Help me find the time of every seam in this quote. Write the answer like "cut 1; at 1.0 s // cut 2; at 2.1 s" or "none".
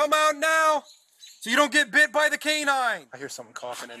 cut 1; at 3.1 s